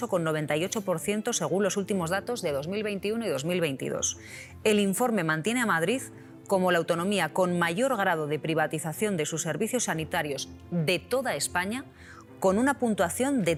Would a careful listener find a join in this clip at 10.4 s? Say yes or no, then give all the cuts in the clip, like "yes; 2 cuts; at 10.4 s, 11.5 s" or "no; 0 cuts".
no; 0 cuts